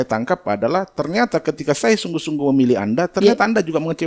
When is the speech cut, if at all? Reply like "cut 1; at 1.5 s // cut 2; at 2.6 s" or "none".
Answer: none